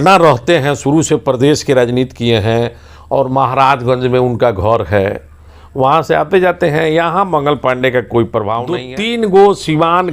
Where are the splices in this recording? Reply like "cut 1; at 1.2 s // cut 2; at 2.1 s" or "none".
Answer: cut 1; at 8.8 s